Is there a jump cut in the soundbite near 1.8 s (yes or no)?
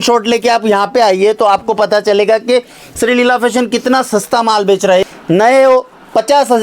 no